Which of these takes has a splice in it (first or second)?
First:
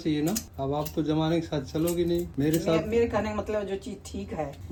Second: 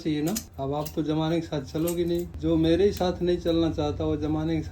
second